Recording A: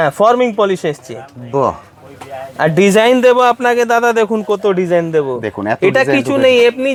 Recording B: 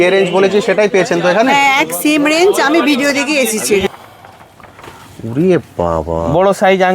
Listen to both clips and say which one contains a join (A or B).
B